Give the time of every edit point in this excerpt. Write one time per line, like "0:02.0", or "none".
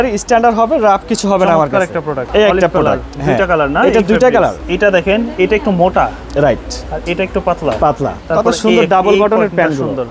0:02.2
0:04.6
0:08.2